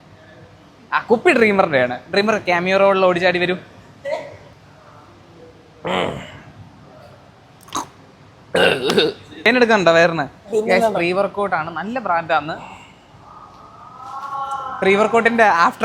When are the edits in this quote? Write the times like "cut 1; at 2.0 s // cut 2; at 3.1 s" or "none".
cut 1; at 4.4 s // cut 2; at 9.5 s